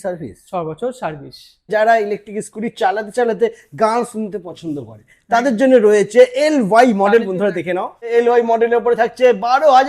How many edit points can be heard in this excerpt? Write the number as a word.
two